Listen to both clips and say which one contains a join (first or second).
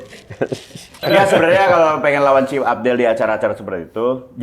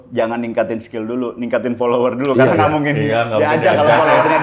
first